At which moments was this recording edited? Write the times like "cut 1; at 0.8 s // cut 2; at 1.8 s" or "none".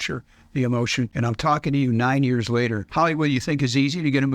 cut 1; at 1.1 s // cut 2; at 2.8 s